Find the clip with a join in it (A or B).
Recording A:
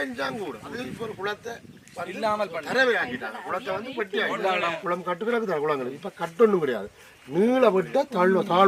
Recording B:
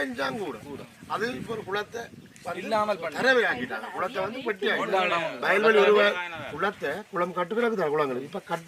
A